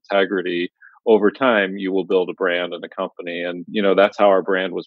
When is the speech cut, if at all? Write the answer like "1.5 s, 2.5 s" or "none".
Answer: 3.7 s